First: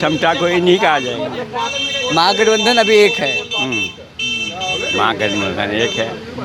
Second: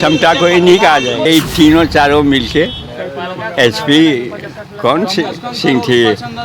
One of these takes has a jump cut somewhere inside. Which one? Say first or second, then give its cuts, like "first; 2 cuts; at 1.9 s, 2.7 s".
second; 1 cut; at 1.3 s